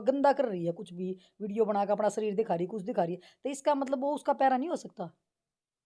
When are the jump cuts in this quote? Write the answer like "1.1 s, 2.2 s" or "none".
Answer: none